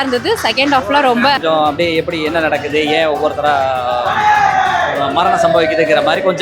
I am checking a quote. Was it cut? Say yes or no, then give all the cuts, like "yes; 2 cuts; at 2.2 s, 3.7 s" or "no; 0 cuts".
yes; 1 cut; at 1.4 s